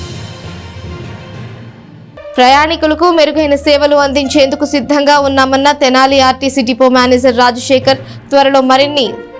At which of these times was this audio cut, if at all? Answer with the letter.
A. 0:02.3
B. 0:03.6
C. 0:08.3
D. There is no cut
A